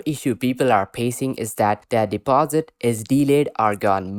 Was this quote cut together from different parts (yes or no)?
no